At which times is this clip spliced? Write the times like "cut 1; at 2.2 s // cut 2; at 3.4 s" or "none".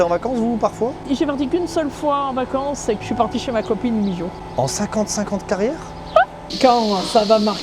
cut 1; at 1.0 s // cut 2; at 3.0 s // cut 3; at 6.5 s